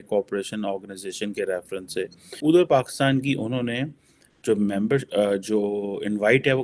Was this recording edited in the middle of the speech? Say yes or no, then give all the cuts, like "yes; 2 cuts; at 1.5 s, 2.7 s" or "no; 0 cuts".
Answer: yes; 1 cut; at 2.3 s